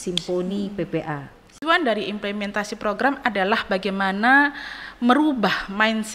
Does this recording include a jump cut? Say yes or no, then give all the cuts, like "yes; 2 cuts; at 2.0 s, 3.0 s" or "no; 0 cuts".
yes; 1 cut; at 1.6 s